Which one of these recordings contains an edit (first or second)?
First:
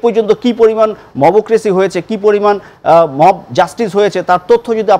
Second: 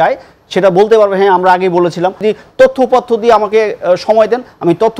second